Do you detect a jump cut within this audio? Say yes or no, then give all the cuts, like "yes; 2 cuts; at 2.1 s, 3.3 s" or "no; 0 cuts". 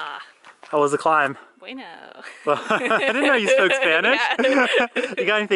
no; 0 cuts